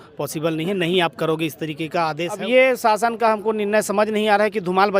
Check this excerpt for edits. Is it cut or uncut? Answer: cut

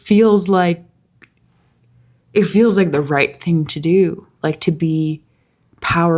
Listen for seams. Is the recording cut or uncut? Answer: uncut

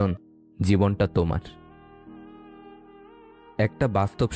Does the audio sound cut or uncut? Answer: uncut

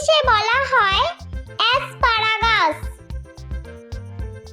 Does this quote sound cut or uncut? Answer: cut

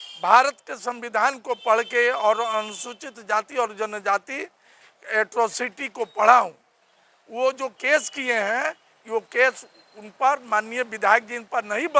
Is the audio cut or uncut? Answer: uncut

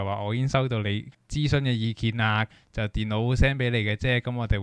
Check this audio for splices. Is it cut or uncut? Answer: uncut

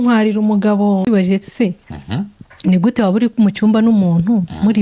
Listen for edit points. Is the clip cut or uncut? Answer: cut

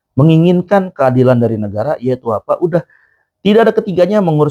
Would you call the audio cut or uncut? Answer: uncut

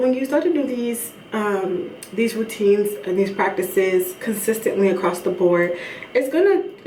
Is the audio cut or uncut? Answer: uncut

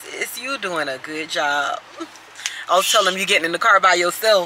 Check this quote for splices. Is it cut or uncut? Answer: uncut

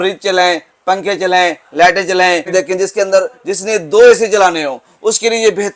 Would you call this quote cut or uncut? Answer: cut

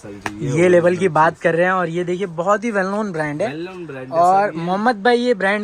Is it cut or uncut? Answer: uncut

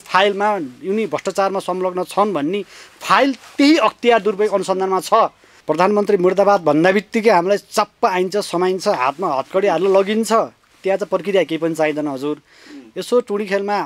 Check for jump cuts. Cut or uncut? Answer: cut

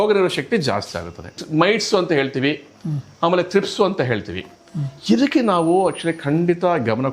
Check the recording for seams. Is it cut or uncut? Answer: cut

